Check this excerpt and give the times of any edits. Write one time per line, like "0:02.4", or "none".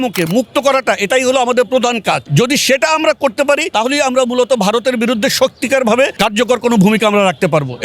0:02.2
0:03.7
0:06.1